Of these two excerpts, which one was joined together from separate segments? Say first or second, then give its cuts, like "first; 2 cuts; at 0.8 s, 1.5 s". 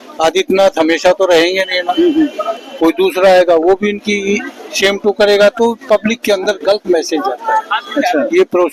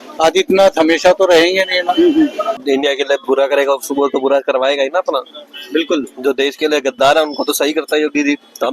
second; 1 cut; at 2.6 s